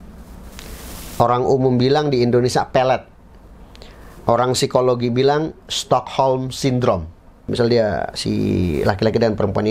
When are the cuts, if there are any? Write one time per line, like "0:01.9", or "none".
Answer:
0:07.5